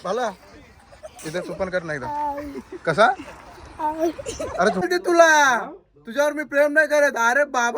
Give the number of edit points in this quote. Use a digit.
1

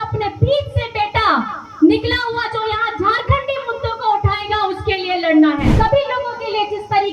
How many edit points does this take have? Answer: 1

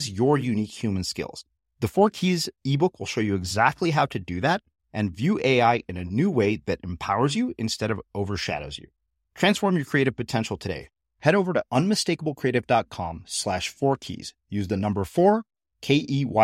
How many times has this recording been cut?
0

